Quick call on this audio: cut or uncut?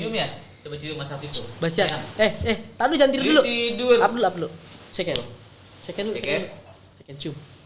uncut